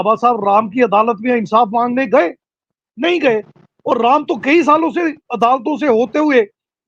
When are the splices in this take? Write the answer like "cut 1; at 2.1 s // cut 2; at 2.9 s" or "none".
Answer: none